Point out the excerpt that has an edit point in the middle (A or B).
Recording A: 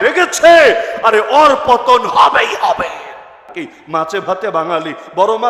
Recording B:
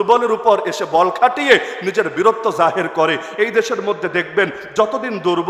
A